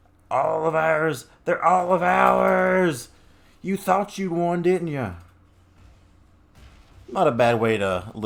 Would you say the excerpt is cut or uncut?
uncut